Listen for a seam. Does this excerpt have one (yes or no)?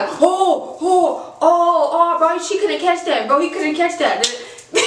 no